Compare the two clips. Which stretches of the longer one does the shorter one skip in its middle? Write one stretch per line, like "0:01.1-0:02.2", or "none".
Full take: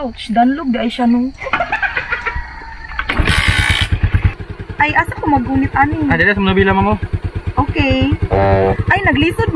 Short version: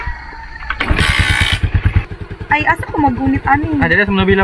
none